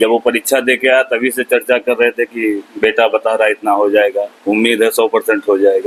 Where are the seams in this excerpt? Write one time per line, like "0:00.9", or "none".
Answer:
none